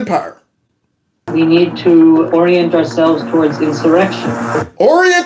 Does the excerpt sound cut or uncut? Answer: cut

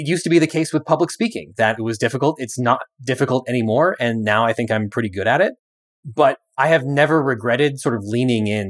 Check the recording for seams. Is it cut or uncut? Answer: cut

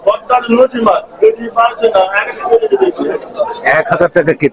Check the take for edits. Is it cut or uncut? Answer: uncut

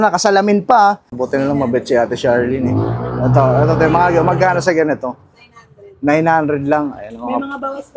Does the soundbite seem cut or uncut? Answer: cut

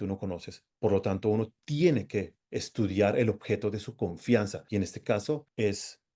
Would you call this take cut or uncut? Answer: uncut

